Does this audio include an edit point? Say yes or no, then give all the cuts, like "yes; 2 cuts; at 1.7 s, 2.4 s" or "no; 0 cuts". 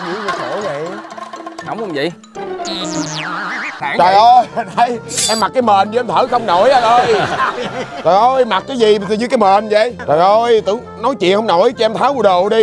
yes; 1 cut; at 3.8 s